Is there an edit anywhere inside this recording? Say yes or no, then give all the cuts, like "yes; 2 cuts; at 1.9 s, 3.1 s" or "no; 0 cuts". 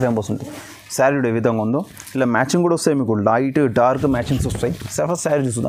no; 0 cuts